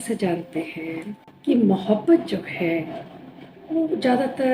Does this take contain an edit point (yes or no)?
yes